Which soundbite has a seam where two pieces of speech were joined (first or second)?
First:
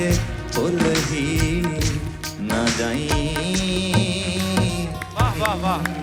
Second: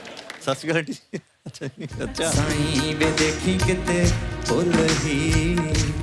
second